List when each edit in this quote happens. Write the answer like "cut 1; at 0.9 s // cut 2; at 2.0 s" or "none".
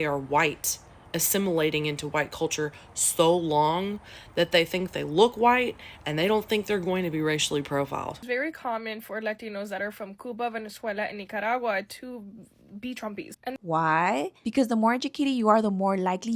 cut 1; at 8.2 s // cut 2; at 13.4 s